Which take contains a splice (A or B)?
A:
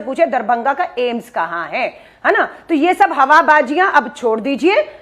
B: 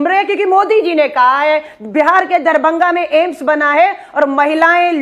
A